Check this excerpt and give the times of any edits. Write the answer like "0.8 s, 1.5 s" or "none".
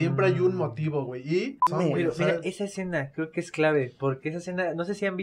1.6 s